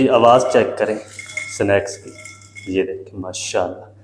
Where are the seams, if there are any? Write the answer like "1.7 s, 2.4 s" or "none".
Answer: none